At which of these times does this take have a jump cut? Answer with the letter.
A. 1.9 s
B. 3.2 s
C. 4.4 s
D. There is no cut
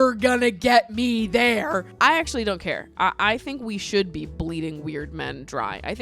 A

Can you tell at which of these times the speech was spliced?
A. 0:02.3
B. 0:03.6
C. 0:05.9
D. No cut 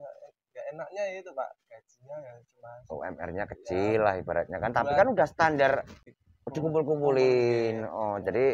C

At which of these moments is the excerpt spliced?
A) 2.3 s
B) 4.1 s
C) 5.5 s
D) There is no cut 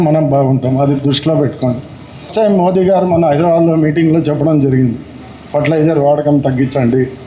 A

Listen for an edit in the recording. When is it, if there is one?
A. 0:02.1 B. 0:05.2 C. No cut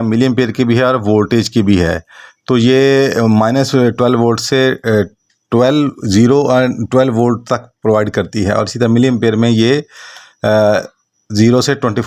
C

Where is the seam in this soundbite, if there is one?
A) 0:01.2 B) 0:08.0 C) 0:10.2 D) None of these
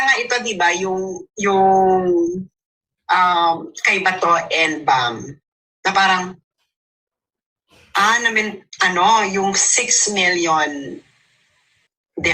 D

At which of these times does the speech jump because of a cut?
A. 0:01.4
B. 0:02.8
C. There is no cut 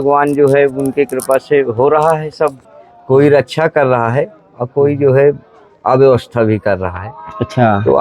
B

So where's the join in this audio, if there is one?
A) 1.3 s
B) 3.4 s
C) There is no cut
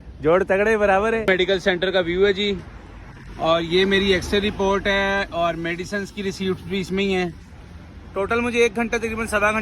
A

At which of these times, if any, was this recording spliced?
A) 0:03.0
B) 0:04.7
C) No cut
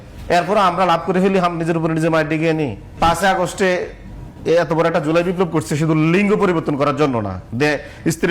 A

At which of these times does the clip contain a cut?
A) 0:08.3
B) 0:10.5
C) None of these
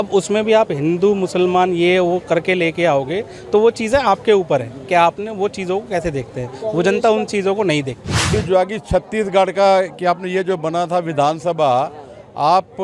A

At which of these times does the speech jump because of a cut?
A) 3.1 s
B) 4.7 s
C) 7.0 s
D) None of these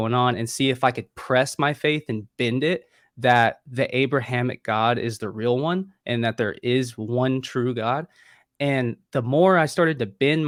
D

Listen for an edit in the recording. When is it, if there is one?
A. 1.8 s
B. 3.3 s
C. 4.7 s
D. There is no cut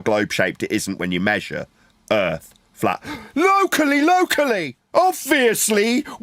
C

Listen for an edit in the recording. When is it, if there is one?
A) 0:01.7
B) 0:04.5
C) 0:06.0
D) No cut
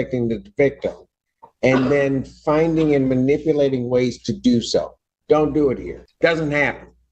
C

